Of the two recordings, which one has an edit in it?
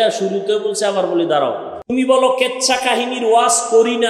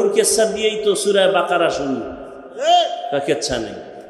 first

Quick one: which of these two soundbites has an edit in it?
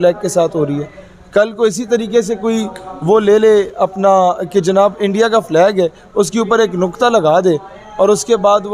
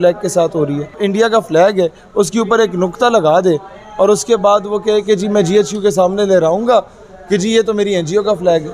second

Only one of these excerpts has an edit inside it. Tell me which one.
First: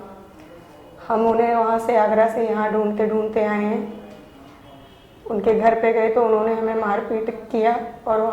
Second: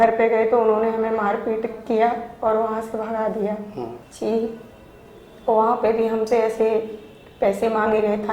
second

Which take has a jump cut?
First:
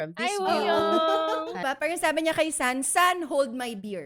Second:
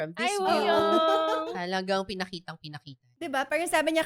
first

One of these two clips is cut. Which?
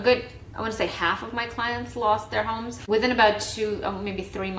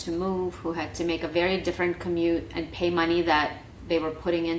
first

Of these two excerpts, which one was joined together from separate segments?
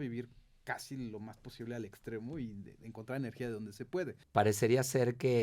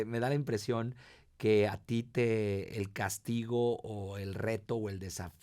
first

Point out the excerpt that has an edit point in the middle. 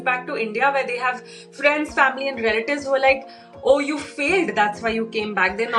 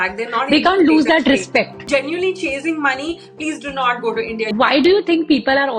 second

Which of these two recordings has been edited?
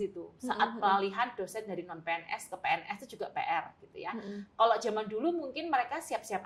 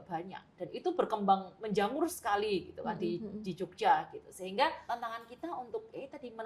second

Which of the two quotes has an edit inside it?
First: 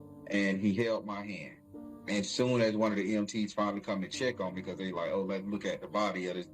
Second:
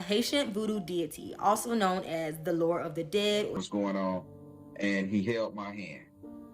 second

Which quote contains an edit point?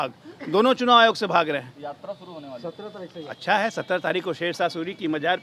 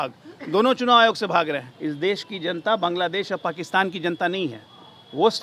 second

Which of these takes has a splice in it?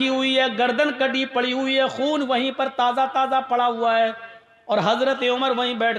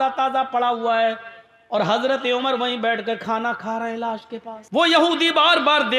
second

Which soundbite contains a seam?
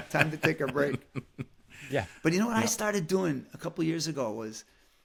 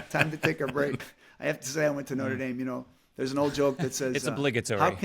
second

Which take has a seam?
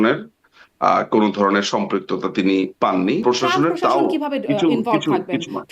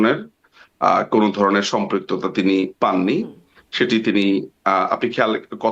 first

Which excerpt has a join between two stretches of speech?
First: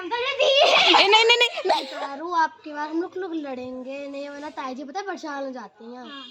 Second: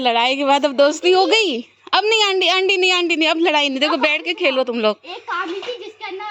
first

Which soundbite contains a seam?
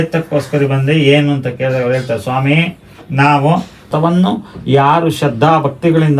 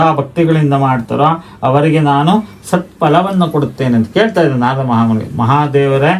first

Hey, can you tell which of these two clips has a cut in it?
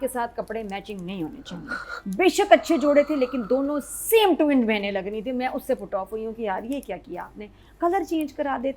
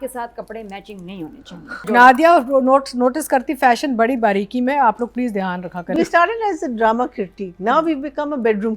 second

